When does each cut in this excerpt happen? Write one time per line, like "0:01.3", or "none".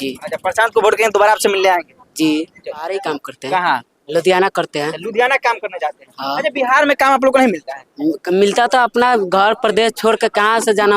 0:02.9